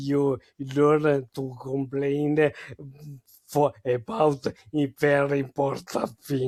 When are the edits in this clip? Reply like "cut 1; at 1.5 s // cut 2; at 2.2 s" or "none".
none